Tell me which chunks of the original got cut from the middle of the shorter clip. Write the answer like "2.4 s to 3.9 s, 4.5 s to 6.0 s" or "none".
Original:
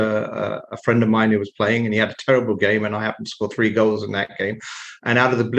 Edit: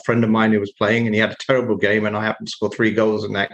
none